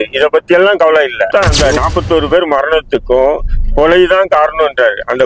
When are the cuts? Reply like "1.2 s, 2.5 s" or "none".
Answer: 1.3 s